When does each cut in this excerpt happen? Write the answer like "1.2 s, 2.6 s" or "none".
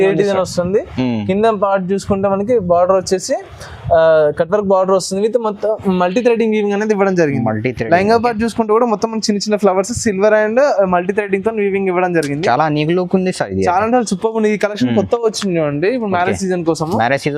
none